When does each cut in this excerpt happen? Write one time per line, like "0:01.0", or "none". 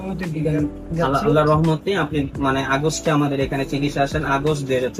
none